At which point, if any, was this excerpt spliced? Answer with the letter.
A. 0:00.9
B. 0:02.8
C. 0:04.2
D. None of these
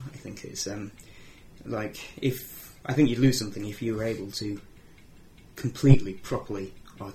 D